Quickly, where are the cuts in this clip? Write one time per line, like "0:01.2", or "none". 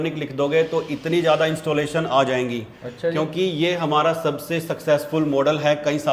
none